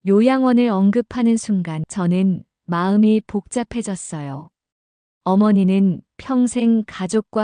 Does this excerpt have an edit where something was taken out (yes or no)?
yes